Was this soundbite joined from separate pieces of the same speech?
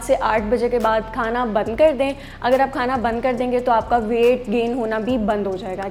no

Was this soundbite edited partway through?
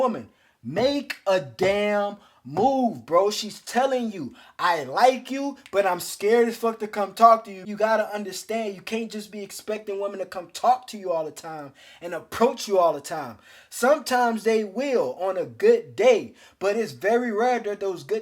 yes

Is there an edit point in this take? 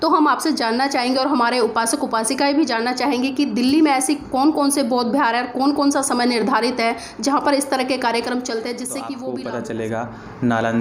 yes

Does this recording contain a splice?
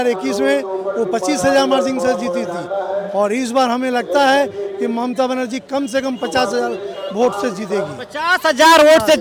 no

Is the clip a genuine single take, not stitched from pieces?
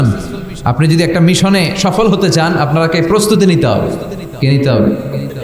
yes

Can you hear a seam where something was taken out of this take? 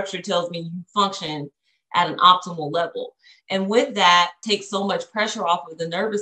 yes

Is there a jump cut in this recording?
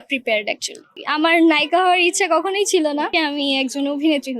yes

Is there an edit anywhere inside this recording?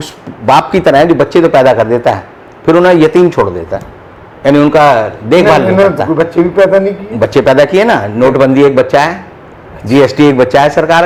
no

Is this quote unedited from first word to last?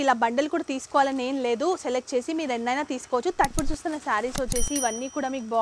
no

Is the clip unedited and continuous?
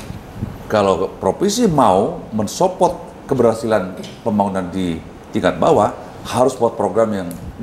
yes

